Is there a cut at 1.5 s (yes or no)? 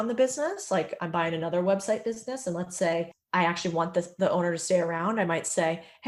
no